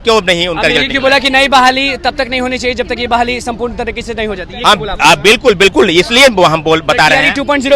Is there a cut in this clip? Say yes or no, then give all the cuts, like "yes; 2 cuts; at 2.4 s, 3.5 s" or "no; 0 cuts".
no; 0 cuts